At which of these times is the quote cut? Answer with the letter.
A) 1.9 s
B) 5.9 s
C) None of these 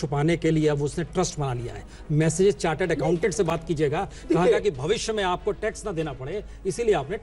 C